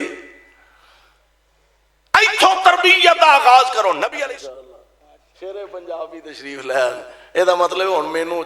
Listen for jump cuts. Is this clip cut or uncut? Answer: cut